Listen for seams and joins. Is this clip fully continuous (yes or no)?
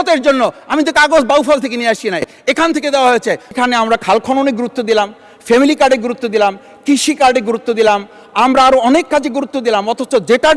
no